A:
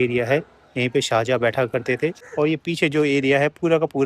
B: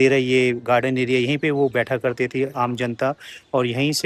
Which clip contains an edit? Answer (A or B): A